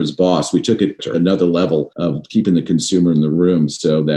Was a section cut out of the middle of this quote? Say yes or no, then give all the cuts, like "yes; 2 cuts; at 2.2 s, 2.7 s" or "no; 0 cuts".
yes; 2 cuts; at 1.1 s, 1.9 s